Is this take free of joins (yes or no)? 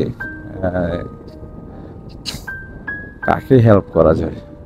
yes